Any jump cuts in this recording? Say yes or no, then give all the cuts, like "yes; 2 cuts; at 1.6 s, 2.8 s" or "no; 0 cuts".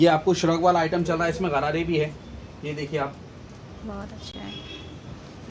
no; 0 cuts